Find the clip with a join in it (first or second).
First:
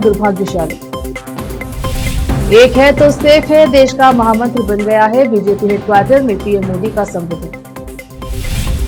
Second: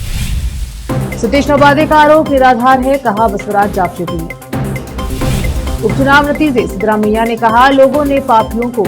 second